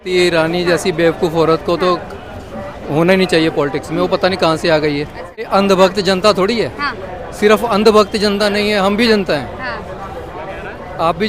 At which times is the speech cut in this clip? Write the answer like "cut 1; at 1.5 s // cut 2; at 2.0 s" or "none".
cut 1; at 5.5 s